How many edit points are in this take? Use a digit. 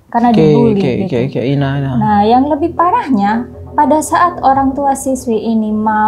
0